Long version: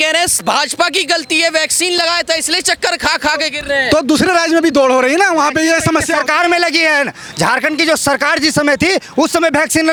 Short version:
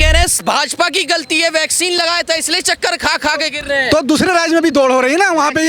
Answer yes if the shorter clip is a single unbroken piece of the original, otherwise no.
yes